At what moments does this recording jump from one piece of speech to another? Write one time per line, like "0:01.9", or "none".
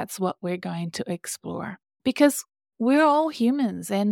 0:01.9